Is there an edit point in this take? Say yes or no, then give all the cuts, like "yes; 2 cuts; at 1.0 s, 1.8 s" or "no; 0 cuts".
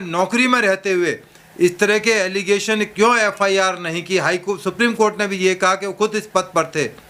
no; 0 cuts